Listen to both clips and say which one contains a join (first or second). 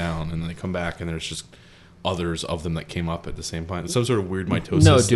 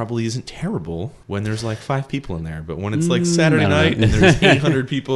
second